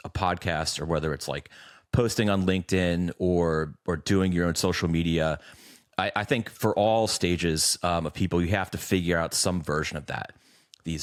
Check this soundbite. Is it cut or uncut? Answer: uncut